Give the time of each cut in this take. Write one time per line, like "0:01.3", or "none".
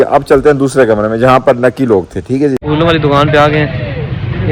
0:02.7